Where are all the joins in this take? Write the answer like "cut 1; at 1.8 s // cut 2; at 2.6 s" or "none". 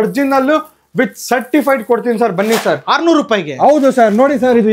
none